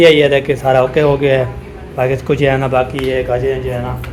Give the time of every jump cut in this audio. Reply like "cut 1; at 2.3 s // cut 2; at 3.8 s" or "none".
none